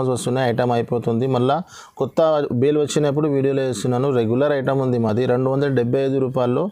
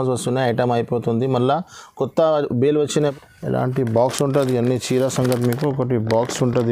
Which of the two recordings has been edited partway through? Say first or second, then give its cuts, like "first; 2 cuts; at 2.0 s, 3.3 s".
second; 1 cut; at 3.1 s